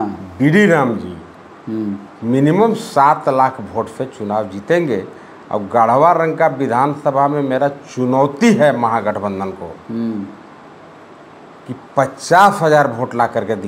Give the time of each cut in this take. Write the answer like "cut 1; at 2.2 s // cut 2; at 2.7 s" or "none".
none